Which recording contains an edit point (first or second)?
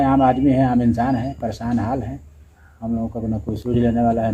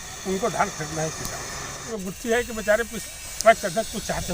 second